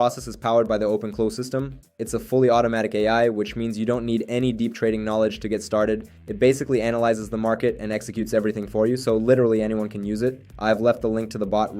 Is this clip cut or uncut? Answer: uncut